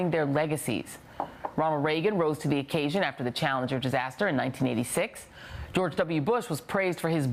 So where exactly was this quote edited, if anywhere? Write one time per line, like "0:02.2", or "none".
none